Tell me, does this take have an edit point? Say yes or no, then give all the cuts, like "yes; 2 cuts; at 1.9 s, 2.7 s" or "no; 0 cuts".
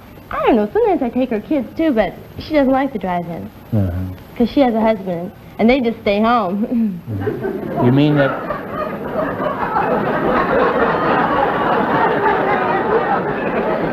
no; 0 cuts